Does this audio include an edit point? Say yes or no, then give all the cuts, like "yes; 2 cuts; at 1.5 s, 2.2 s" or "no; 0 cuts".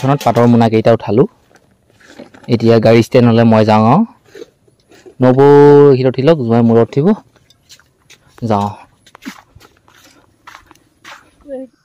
no; 0 cuts